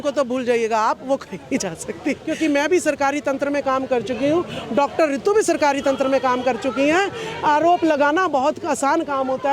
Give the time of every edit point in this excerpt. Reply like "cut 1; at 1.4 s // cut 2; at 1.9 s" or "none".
cut 1; at 2.3 s